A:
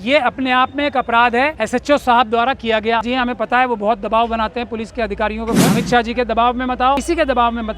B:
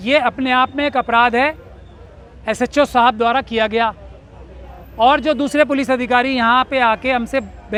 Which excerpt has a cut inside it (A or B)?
A